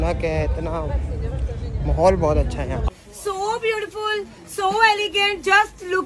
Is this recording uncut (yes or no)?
yes